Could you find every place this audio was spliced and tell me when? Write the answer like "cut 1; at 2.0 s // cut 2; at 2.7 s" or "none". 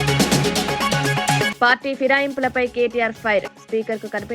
cut 1; at 1.5 s